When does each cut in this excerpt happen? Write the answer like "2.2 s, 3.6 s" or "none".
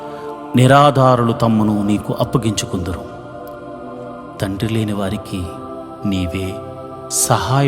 3.0 s, 4.4 s